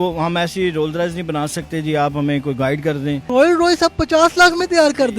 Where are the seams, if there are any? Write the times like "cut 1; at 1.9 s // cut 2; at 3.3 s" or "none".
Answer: cut 1; at 3.3 s